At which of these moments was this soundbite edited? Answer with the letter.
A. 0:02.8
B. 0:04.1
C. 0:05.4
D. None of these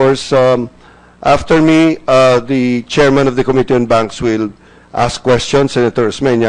A